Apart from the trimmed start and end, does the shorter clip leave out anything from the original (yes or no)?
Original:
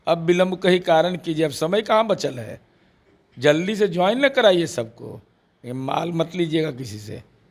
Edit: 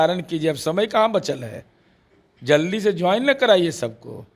no